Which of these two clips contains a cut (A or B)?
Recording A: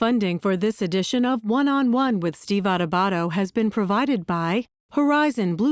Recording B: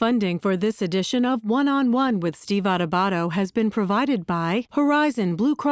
B